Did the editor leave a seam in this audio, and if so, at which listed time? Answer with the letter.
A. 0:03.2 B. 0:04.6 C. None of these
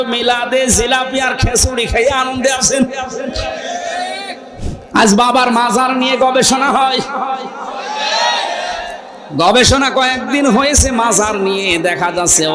B